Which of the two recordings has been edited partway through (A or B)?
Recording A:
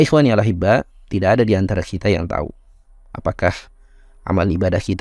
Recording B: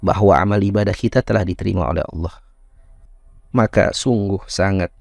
B